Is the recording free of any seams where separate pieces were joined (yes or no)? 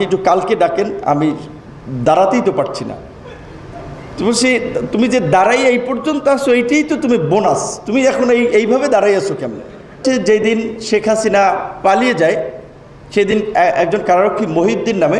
no